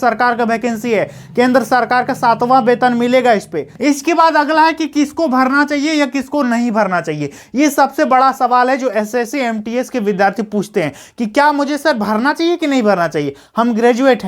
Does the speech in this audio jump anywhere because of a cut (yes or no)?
yes